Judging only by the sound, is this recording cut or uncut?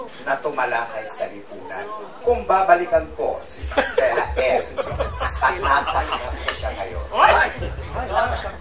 uncut